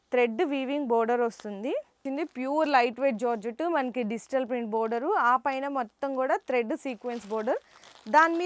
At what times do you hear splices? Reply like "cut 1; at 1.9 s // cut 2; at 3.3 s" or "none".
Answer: cut 1; at 2.0 s